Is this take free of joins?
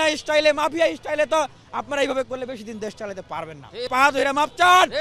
no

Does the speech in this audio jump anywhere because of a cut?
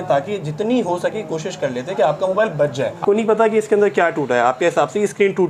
yes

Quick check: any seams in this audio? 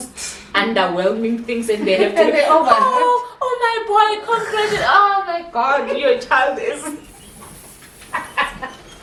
no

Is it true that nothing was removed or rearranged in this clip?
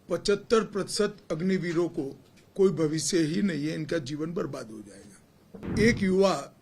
no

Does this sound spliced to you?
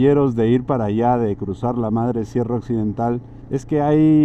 yes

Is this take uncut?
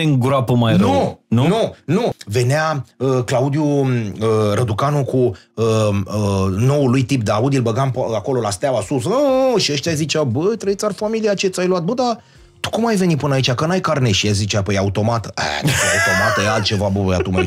no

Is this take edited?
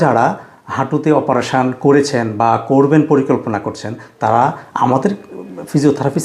no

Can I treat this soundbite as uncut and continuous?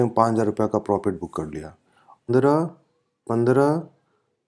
no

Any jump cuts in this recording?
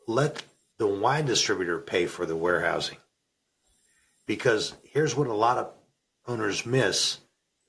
no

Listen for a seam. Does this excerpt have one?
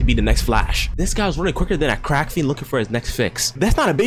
no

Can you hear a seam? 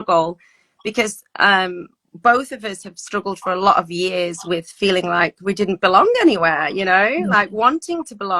no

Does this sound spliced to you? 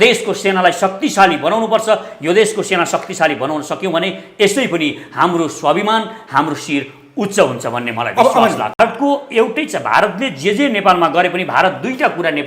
yes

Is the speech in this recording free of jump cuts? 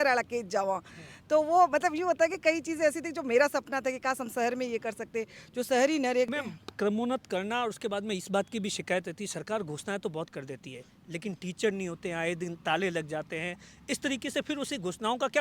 no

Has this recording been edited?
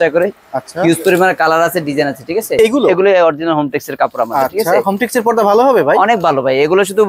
yes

